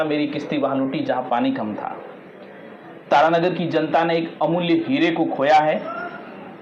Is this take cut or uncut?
uncut